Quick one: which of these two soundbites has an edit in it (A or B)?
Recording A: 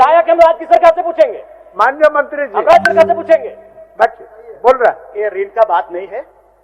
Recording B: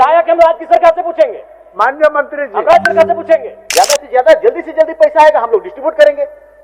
B